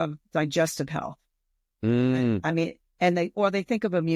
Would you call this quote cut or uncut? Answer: uncut